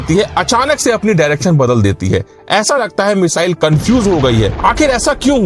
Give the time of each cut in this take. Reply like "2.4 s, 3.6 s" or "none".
4.5 s